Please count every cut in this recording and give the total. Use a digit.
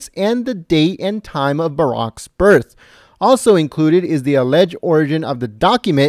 1